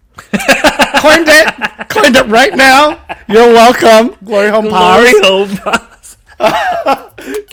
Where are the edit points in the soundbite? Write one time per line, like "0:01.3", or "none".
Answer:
none